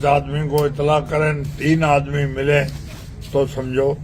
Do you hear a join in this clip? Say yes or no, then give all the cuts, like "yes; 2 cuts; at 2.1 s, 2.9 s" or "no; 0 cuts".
no; 0 cuts